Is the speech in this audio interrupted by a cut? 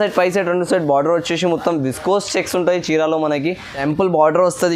yes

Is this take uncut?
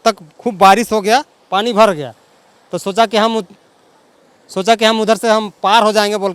yes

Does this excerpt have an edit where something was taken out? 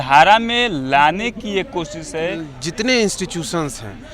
yes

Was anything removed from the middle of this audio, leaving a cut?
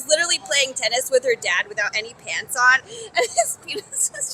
yes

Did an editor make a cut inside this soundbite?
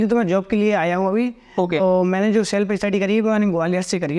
no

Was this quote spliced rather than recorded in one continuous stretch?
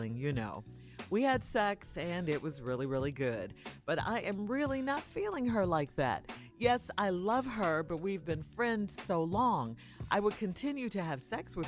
no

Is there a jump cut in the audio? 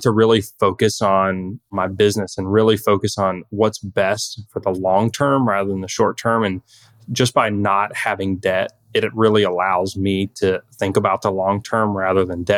no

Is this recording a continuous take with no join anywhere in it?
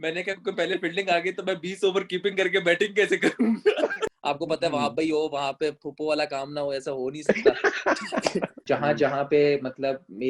no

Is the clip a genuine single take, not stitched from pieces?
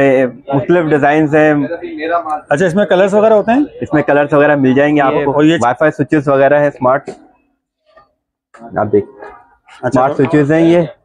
no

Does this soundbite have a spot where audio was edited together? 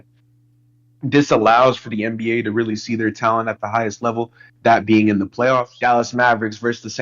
yes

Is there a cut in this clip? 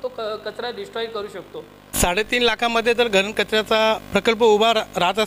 yes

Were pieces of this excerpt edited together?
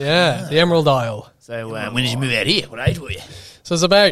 yes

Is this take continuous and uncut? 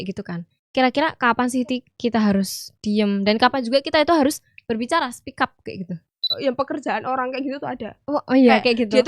no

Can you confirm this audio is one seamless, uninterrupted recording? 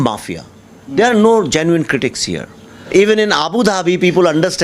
no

